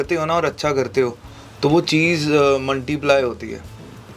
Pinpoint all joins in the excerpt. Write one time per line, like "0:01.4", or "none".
none